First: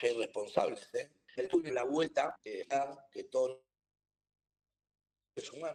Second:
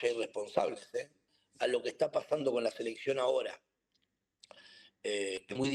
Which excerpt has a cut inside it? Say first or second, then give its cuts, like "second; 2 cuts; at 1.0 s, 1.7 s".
second; 1 cut; at 1.2 s